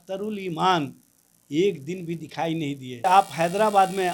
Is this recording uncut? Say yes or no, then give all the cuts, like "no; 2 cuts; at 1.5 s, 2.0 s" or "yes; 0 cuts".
no; 1 cut; at 3.0 s